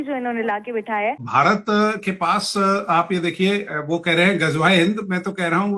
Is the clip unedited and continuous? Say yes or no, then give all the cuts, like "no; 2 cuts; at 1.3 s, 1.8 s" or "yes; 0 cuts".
no; 1 cut; at 1.2 s